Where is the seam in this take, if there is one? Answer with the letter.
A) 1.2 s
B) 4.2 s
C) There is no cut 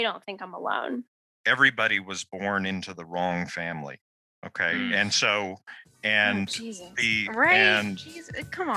A